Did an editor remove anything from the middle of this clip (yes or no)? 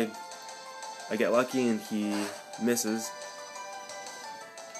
no